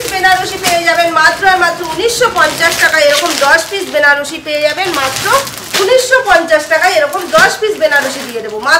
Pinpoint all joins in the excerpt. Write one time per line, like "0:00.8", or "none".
none